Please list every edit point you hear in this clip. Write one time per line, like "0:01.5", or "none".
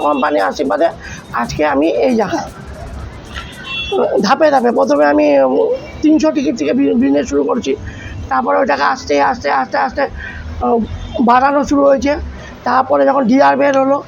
none